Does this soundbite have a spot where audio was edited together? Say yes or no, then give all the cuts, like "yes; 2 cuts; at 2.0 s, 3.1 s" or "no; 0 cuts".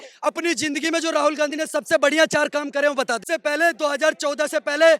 yes; 1 cut; at 3.2 s